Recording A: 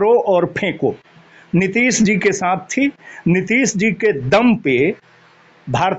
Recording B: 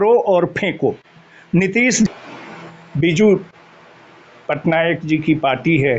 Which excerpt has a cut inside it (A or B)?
B